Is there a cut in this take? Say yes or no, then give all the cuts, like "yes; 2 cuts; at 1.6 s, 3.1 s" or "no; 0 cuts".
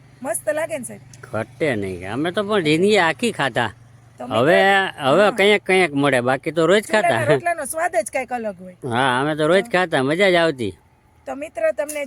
no; 0 cuts